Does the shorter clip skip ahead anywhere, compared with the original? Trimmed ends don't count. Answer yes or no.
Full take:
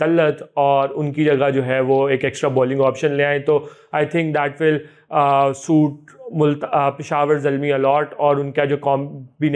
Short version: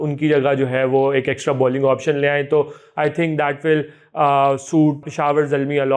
yes